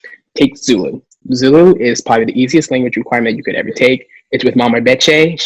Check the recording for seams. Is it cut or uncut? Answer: uncut